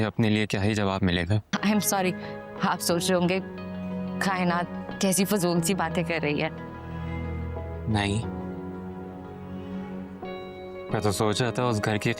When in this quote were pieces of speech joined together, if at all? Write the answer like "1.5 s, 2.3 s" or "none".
1.4 s

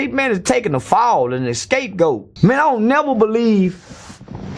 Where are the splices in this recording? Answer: 2.3 s

